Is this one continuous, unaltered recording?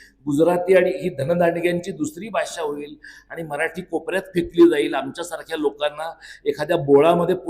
yes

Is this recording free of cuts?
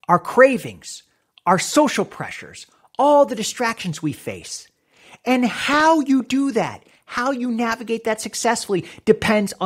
yes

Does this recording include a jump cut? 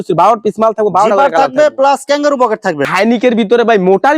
yes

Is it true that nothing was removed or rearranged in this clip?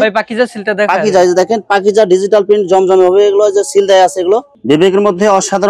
no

